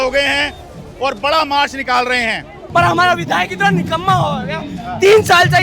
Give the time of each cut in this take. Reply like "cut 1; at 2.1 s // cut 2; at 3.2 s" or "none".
cut 1; at 2.6 s